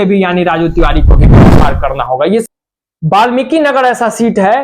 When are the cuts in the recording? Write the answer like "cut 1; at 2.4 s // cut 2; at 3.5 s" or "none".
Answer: cut 1; at 2.4 s